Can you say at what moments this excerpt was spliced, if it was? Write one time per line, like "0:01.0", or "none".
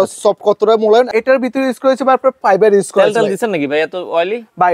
0:01.1